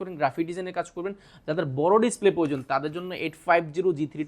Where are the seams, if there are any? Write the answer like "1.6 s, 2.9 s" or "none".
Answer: none